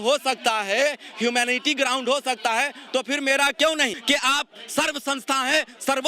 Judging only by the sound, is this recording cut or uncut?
cut